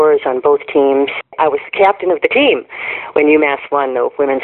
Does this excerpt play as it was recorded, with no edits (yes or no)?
no